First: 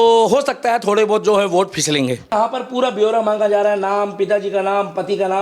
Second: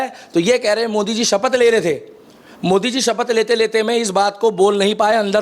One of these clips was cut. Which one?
first; 1 cut; at 2.3 s

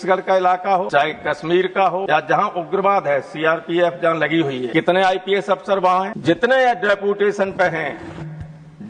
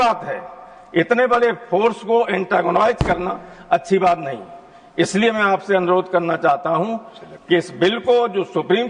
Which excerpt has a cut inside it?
first; 4 cuts; at 0.9 s, 2.0 s, 4.7 s, 6.1 s

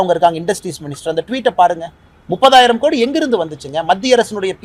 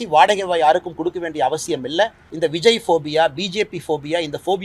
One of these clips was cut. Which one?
second; 1 cut; at 2.2 s

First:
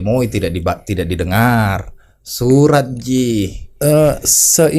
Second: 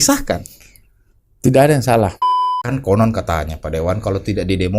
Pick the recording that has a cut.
second; 1 cut; at 2.4 s

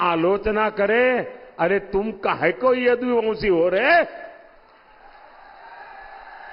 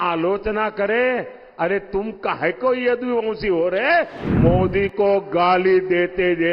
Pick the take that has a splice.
second; 1 cut; at 4.2 s

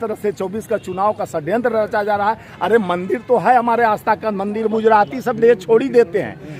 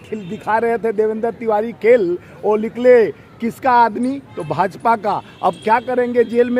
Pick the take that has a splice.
first; 1 cut; at 4.7 s

